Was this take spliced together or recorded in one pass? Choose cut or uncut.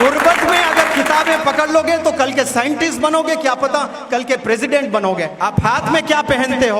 cut